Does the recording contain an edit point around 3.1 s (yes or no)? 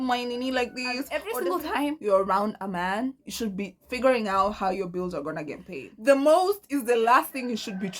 no